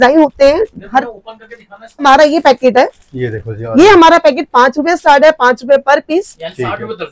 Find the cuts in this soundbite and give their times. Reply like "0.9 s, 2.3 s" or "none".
2.0 s